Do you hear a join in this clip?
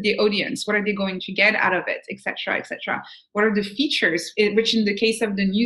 no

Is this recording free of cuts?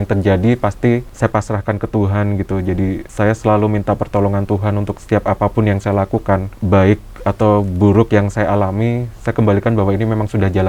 no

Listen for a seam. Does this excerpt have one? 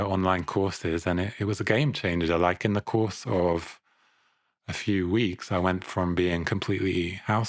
no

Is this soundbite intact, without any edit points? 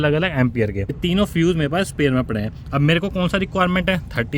no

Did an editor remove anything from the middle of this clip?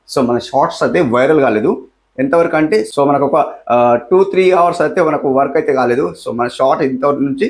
no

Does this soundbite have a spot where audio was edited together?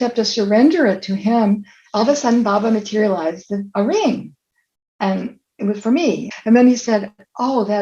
yes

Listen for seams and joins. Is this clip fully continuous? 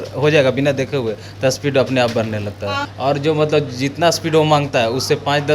no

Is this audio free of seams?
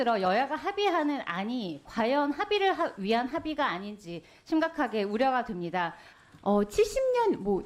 no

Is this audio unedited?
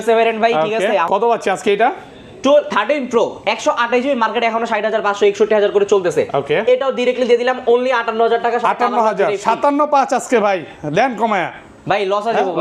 no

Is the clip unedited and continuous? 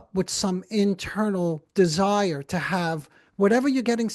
yes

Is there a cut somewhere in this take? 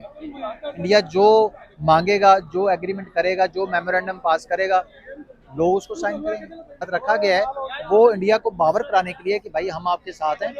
yes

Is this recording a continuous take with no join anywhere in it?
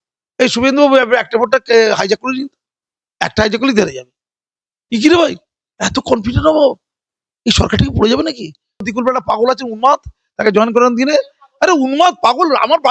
no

